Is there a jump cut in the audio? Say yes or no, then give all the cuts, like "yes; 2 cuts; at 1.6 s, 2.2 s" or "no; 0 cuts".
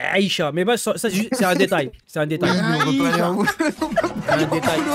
no; 0 cuts